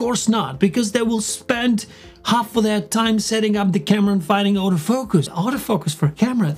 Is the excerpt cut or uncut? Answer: cut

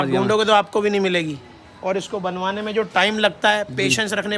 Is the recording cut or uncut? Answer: uncut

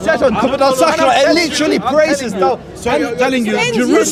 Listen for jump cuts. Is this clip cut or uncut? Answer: uncut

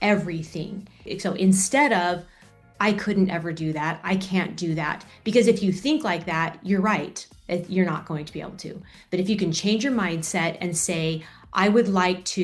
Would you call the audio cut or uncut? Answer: cut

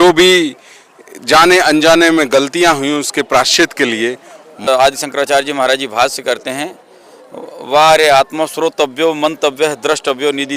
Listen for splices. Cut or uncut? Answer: cut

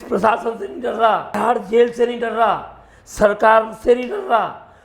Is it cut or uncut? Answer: cut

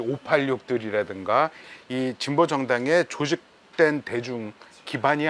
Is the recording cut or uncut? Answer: cut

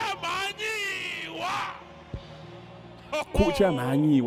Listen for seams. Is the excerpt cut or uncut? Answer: uncut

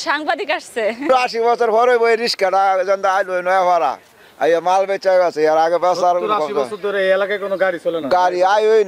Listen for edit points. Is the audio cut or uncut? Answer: cut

